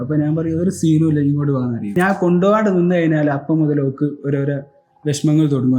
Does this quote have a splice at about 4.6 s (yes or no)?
no